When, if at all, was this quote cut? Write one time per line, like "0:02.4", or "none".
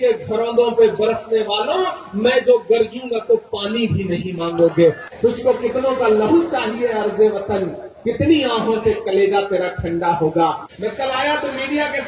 0:05.1
0:10.7